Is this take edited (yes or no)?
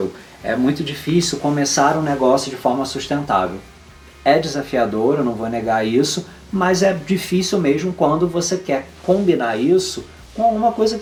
no